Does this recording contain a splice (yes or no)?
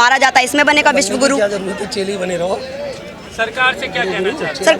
no